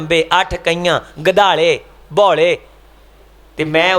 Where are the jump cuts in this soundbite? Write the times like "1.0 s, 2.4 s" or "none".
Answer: none